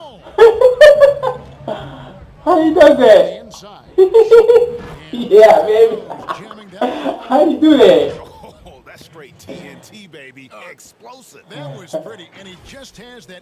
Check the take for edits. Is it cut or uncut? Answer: uncut